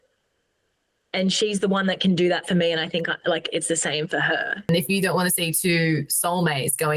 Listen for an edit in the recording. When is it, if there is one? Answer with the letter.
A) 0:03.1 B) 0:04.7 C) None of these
B